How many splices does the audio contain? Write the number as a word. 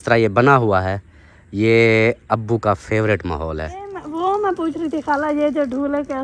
one